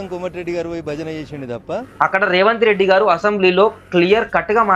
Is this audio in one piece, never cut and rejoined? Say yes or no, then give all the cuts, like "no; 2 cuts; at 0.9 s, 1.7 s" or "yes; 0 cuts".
no; 1 cut; at 1.8 s